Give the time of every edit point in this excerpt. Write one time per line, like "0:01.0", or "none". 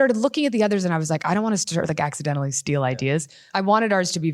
0:03.4

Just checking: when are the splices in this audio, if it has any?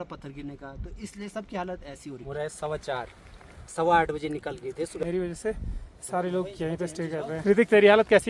0:02.3
0:05.0
0:07.4

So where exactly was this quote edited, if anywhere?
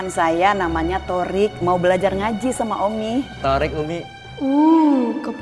0:03.3
0:04.2

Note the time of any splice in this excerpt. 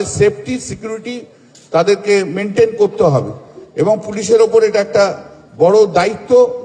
none

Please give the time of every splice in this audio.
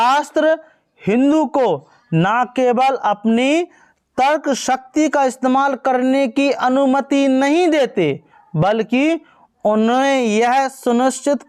none

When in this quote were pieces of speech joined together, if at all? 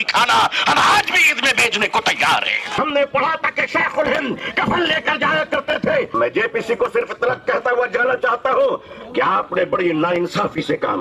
0:02.6
0:06.1

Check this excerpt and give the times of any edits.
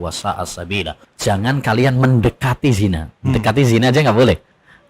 0:01.0

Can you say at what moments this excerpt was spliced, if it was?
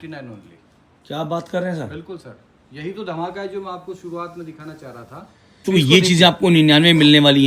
0:05.6

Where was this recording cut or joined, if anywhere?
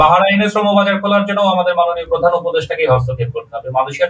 none

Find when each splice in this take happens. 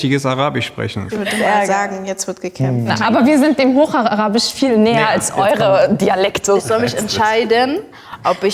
0:01.0
0:02.9
0:06.6

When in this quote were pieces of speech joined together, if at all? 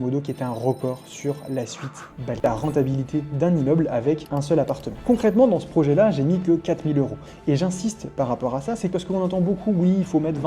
0:02.4
0:05.0

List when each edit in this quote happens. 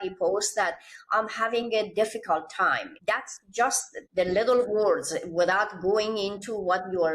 0:02.9
0:03.9

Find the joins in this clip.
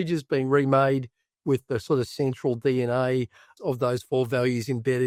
none

